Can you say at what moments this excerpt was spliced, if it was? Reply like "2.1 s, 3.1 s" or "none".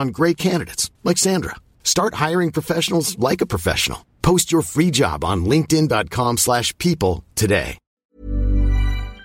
7.9 s